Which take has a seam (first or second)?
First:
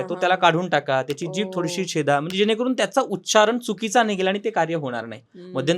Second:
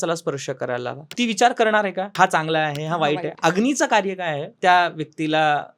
second